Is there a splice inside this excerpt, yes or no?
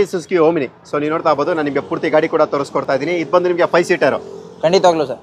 no